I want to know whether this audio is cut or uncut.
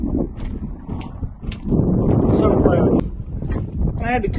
cut